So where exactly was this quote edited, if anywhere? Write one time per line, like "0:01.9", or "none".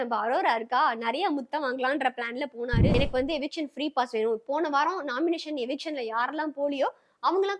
0:02.9